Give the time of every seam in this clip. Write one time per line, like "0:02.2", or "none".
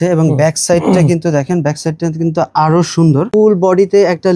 0:03.3